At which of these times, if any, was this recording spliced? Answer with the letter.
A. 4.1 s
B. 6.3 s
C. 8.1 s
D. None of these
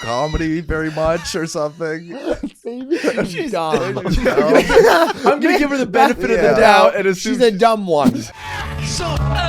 C